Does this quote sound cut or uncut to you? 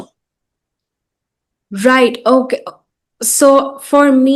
uncut